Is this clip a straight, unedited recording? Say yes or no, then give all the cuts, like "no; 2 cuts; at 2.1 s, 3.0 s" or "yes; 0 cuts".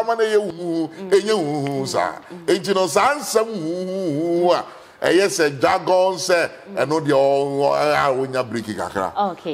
yes; 0 cuts